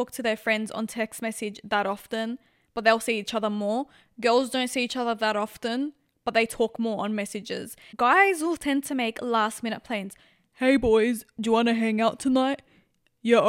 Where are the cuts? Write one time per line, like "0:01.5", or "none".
0:07.8